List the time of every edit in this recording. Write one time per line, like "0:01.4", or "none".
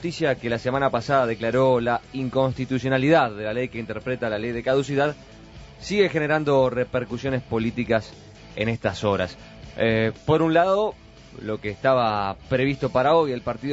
0:09.3

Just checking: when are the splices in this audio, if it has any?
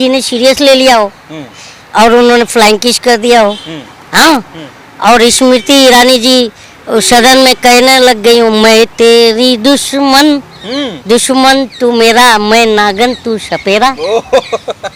none

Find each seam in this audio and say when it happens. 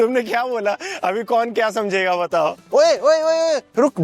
0:02.6

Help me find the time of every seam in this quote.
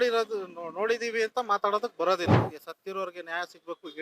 0:02.4

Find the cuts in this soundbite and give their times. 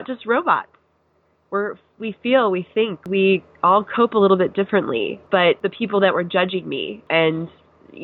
0:03.0
0:05.5
0:07.0

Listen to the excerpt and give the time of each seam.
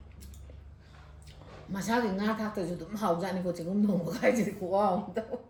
none

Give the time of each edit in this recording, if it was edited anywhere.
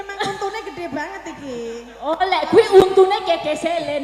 none

